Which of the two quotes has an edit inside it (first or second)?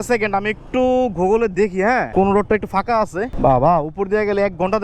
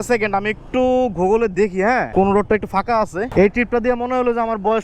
second